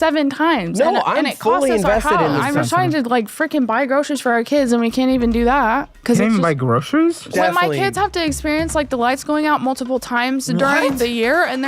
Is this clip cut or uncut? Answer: cut